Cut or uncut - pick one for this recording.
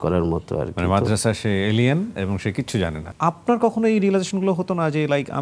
cut